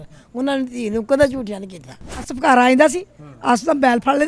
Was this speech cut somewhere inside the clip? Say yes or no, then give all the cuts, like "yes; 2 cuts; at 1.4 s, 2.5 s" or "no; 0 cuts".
yes; 1 cut; at 2.3 s